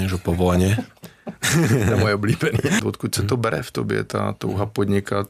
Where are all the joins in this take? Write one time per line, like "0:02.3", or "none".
0:02.8